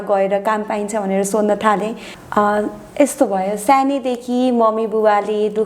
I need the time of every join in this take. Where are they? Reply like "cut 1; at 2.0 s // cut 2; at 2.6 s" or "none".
cut 1; at 2.2 s